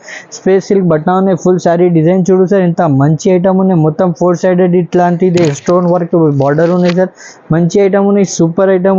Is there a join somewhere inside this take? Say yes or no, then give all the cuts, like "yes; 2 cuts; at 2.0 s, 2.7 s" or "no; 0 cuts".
no; 0 cuts